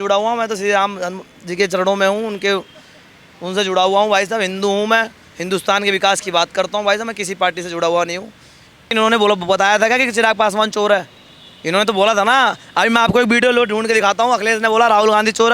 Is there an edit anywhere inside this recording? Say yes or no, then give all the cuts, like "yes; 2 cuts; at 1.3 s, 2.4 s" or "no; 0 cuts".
yes; 1 cut; at 8.9 s